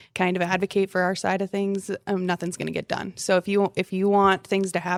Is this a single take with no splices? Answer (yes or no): yes